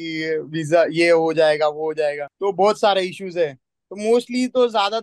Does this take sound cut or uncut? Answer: cut